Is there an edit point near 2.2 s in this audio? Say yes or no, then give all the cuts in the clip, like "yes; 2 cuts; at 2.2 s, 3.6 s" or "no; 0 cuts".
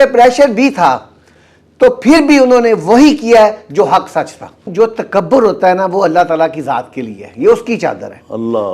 no; 1 cut; at 4.7 s